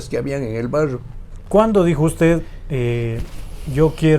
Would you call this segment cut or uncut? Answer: cut